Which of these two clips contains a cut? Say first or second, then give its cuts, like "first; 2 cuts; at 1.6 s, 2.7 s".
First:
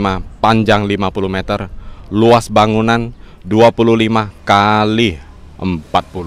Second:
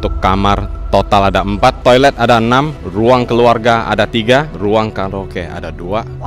second; 3 cuts; at 1.8 s, 2.8 s, 4.5 s